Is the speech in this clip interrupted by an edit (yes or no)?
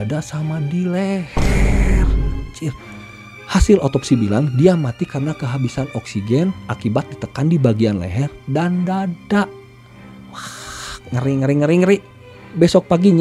no